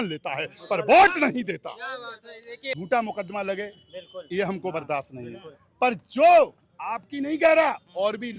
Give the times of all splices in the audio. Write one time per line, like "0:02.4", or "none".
0:02.8

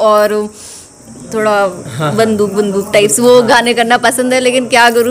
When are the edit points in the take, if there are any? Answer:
none

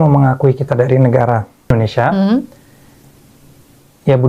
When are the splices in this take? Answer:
0:01.7

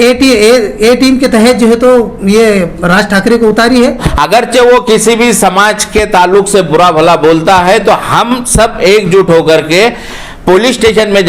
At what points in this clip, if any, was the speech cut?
0:04.1

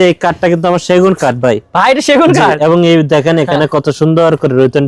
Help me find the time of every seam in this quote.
none

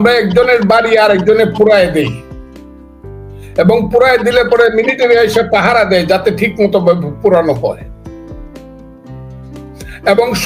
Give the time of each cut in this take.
0:02.1
0:03.5

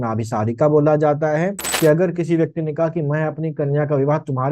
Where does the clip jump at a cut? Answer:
0:01.7

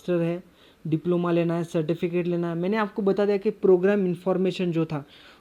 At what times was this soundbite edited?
none

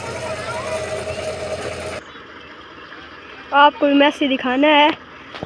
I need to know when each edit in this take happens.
0:02.0

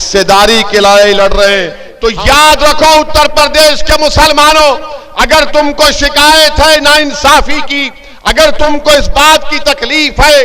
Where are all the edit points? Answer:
0:01.8

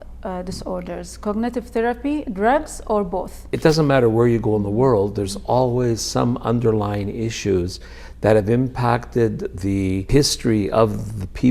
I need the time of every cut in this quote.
0:03.5
0:10.1

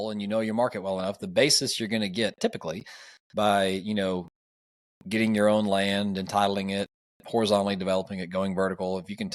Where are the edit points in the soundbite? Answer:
none

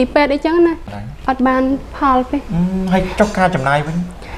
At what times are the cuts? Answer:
0:00.9

